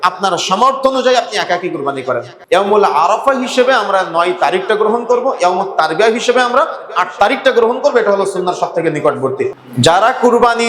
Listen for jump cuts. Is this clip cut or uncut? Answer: cut